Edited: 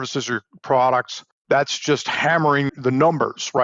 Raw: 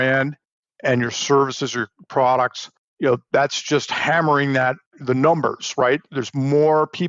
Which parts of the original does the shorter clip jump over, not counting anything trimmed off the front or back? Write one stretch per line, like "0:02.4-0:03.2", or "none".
0:02.9-0:03.2
0:04.5-0:04.9